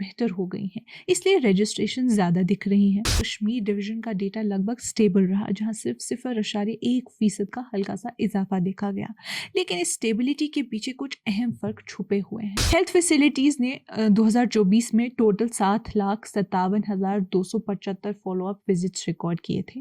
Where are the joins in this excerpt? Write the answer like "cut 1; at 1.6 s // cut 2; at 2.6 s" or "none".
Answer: cut 1; at 3.2 s // cut 2; at 12.6 s